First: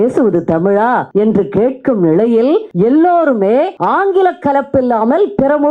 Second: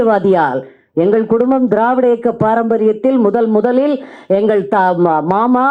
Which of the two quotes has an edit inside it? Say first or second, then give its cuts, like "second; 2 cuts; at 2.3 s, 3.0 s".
first; 3 cuts; at 1.1 s, 2.7 s, 3.8 s